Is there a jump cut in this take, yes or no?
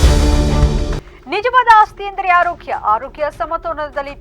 yes